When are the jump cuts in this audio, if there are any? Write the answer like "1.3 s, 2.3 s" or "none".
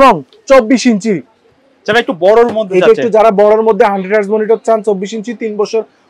none